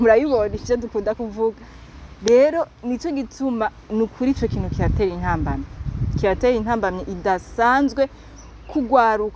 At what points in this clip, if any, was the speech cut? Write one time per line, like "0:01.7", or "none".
none